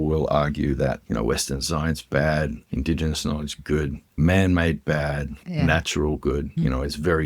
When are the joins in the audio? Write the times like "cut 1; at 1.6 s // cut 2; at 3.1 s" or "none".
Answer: cut 1; at 1.0 s // cut 2; at 2.6 s // cut 3; at 4.1 s // cut 4; at 5.4 s // cut 5; at 6.5 s

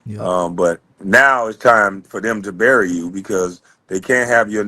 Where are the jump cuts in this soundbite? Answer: cut 1; at 0.9 s

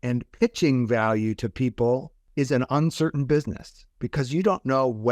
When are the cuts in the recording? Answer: cut 1; at 2.2 s

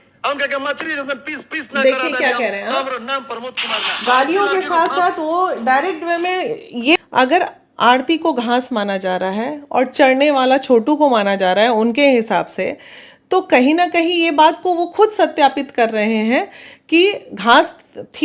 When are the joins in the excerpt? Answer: cut 1; at 7.0 s

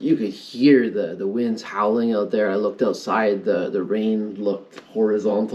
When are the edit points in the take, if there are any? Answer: none

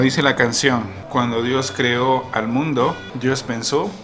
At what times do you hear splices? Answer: cut 1; at 1.0 s // cut 2; at 3.1 s

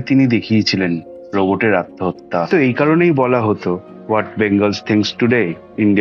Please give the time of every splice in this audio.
cut 1; at 2.5 s

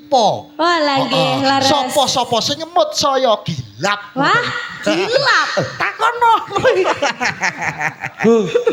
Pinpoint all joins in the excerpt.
none

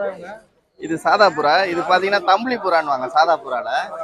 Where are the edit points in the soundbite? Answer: none

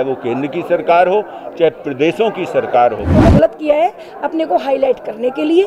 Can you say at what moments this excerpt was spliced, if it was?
cut 1; at 3.3 s

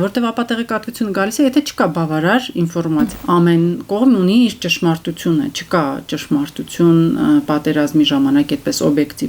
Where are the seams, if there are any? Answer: cut 1; at 3.2 s

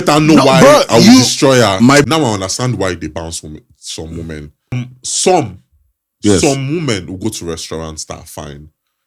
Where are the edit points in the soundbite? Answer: cut 1; at 2.0 s // cut 2; at 4.8 s

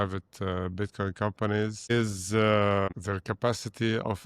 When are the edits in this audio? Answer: cut 1; at 1.9 s // cut 2; at 2.9 s

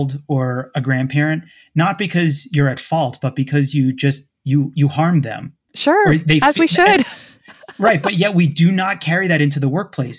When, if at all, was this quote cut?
none

